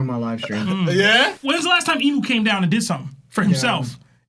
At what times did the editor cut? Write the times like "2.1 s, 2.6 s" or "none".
1.3 s